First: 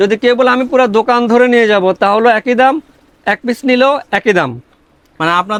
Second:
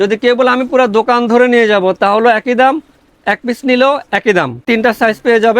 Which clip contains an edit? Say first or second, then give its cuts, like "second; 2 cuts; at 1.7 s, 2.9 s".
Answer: second; 1 cut; at 4.6 s